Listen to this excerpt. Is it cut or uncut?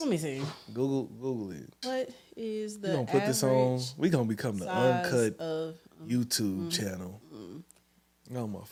uncut